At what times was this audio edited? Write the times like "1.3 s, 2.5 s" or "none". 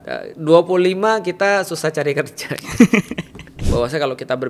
3.6 s